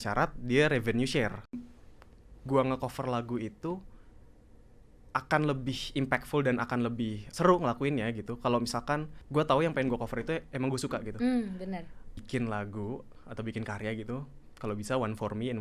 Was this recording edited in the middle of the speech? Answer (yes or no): yes